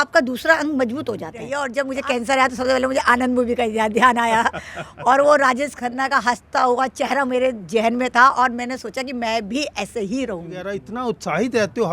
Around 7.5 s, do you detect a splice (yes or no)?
no